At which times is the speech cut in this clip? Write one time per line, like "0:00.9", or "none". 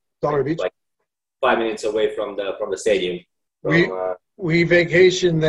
none